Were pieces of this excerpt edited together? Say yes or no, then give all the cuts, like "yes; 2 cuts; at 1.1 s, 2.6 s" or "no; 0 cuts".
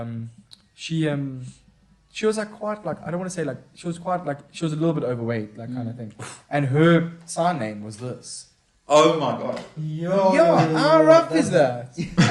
no; 0 cuts